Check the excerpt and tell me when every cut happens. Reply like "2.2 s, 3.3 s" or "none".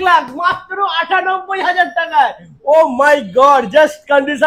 none